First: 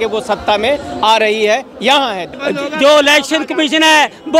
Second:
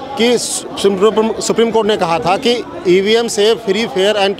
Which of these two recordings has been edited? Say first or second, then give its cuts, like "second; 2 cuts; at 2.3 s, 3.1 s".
first; 1 cut; at 2.3 s